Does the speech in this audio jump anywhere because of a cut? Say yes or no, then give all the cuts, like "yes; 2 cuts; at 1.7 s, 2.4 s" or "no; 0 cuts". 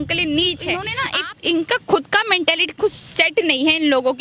yes; 1 cut; at 1.0 s